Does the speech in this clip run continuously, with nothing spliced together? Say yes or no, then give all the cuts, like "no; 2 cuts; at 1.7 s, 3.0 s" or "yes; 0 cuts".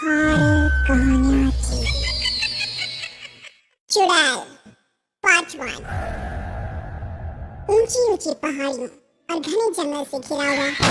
no; 1 cut; at 1.0 s